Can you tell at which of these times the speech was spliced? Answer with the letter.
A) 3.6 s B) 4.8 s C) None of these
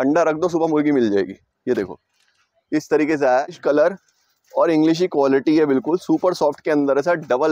A